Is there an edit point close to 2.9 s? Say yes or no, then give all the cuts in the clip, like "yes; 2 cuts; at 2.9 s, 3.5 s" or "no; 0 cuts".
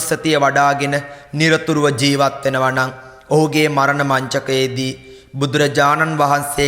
no; 0 cuts